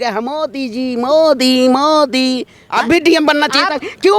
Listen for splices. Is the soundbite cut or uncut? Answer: cut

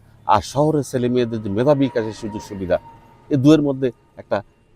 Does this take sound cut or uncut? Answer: uncut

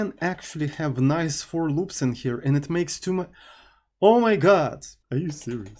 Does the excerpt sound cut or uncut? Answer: cut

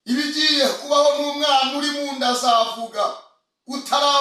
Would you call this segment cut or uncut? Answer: uncut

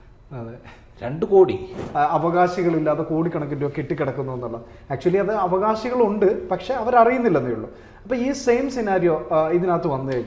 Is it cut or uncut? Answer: cut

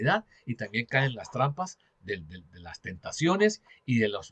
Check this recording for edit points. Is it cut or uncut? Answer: uncut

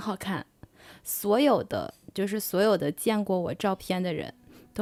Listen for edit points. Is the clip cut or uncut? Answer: uncut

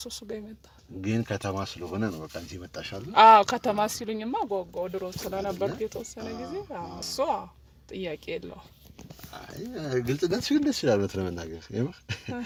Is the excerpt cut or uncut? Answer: uncut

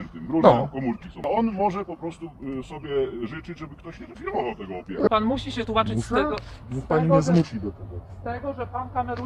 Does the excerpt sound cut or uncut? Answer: cut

